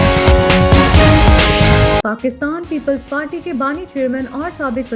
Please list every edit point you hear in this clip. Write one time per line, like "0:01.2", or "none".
0:02.0